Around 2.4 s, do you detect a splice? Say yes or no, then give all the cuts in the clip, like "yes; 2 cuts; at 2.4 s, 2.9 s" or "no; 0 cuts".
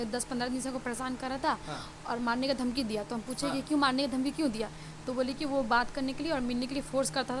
no; 0 cuts